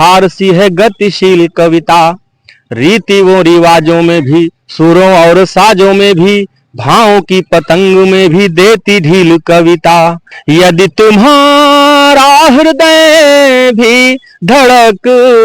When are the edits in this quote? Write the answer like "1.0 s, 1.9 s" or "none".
10.3 s